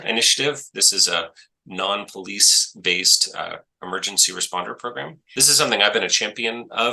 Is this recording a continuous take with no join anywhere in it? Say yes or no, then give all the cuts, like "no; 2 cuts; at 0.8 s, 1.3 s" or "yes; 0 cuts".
no; 1 cut; at 5.2 s